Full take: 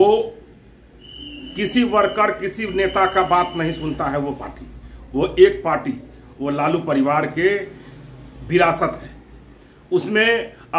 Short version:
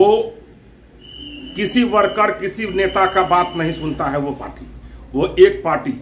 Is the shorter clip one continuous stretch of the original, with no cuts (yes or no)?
yes